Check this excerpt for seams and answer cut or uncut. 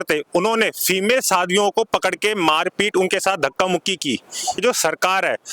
cut